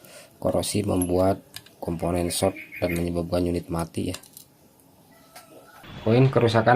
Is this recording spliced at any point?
yes; 1 cut; at 5.8 s

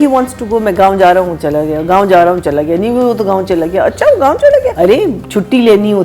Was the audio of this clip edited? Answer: yes; 1 cut; at 4.7 s

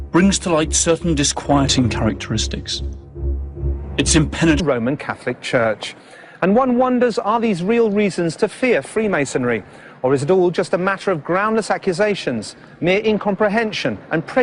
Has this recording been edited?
no; 0 cuts

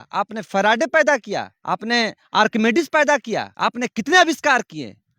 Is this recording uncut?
no; 2 cuts; at 1.5 s, 3.5 s

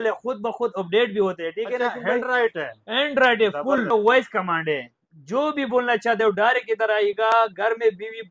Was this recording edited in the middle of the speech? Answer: yes; 1 cut; at 3.9 s

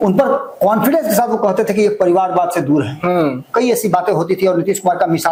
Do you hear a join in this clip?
no; 0 cuts

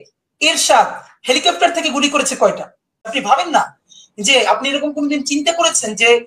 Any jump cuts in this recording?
yes; 1 cut; at 3.2 s

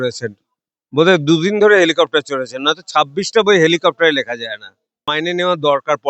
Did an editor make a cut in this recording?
yes; 1 cut; at 5.1 s

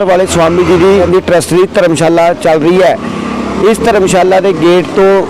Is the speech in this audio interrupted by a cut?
yes; 1 cut; at 1.0 s

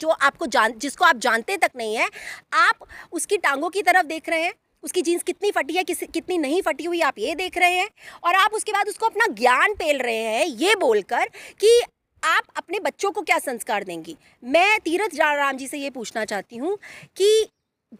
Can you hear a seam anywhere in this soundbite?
no; 0 cuts

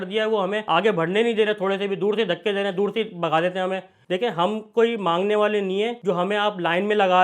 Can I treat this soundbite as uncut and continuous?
no; 1 cut; at 4.0 s

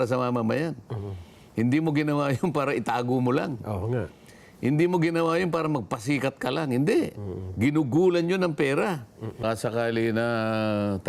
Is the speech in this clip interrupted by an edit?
yes; 1 cut; at 9.4 s

